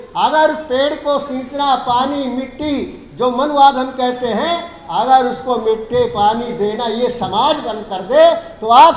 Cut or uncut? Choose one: uncut